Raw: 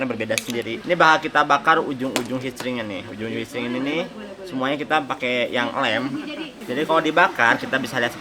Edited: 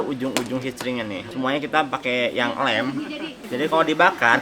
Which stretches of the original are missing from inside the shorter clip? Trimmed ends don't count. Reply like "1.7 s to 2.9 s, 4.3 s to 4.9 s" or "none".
3.0 s to 4.4 s